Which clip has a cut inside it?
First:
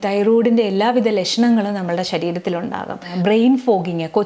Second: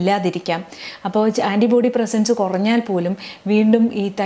first; 1 cut; at 3.0 s

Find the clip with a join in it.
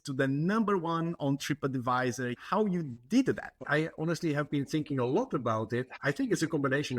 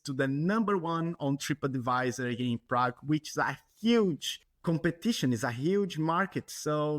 first; 3 cuts; at 2.3 s, 3.6 s, 6.0 s

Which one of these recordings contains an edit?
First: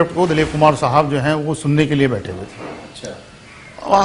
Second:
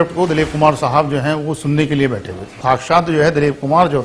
second; 1 cut; at 2.5 s

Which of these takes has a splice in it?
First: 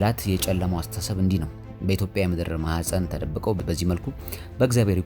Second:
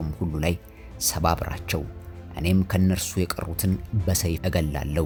first; 1 cut; at 3.6 s

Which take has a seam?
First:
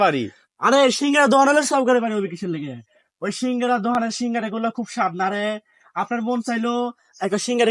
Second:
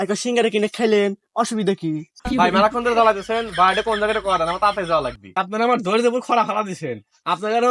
second; 1 cut; at 5.4 s

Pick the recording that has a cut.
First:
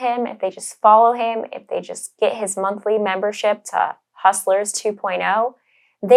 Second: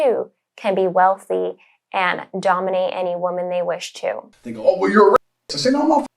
second; 1 cut; at 4.3 s

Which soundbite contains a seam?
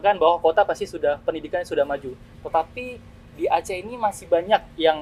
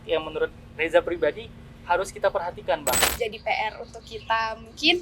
second; 1 cut; at 3.0 s

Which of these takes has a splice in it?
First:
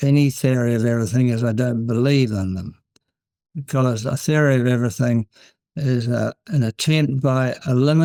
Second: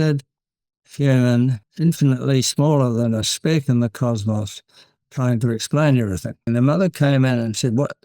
second; 2 cuts; at 1.6 s, 6.5 s

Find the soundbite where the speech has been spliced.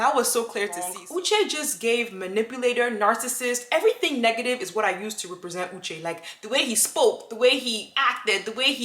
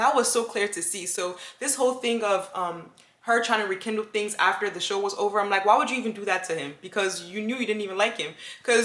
first; 1 cut; at 1.0 s

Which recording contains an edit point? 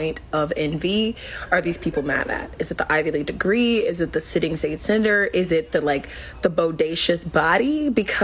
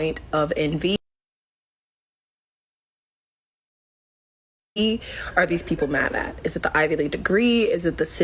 first; 1 cut; at 0.9 s

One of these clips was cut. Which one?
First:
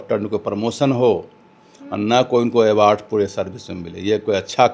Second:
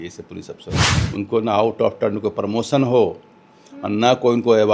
second; 1 cut; at 0.9 s

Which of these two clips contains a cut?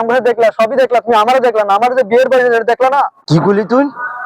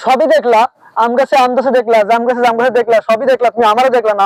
first; 1 cut; at 3.2 s

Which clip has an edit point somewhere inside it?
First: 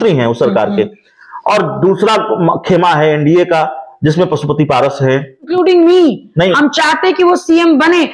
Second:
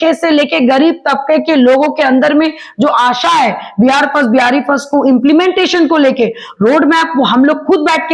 first; 1 cut; at 5.5 s

